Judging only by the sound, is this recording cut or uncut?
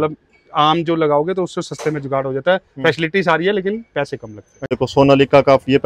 cut